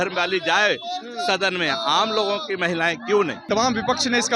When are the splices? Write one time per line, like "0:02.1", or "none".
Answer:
0:03.4